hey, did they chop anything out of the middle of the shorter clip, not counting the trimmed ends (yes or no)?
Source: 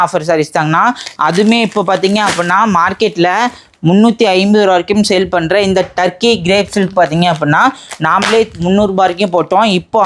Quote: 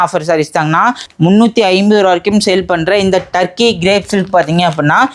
yes